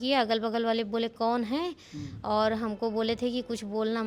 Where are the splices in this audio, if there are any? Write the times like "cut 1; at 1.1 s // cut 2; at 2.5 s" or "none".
none